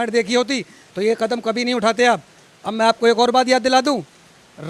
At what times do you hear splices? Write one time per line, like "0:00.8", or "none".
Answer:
none